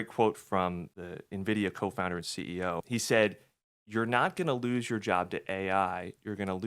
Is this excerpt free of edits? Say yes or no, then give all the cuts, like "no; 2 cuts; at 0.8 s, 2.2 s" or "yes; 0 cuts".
no; 2 cuts; at 0.9 s, 2.8 s